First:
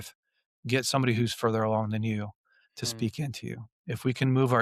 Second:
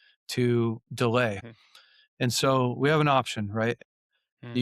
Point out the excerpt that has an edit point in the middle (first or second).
second